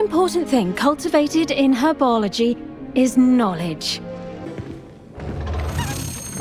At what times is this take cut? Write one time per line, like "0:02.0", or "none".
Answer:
0:04.5